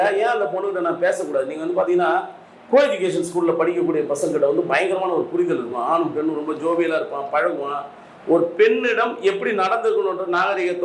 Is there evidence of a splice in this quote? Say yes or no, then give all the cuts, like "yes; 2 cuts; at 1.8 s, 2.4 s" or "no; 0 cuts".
no; 0 cuts